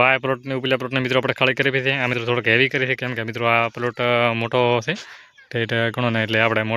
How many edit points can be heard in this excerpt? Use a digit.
0